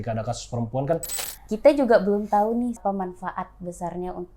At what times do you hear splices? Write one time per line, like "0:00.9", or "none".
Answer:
0:01.2
0:02.8